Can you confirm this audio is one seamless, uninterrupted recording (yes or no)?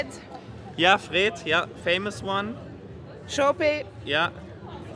yes